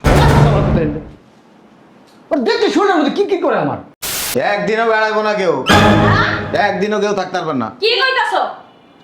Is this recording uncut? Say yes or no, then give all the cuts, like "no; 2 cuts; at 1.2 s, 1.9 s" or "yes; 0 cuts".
no; 1 cut; at 4.2 s